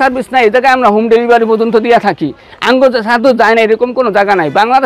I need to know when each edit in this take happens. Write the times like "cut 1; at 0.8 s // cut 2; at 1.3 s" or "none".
none